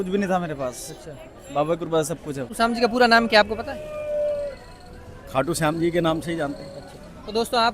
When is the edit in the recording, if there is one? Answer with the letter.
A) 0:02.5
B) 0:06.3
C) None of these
A